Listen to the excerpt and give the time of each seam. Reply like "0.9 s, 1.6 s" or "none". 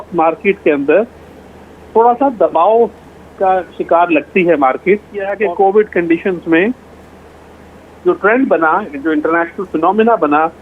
5.3 s